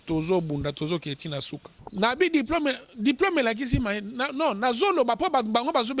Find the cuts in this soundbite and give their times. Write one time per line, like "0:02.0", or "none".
0:01.8